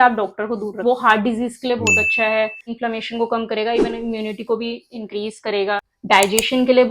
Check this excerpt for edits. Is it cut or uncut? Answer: cut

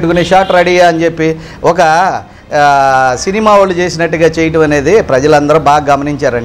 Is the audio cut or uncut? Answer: uncut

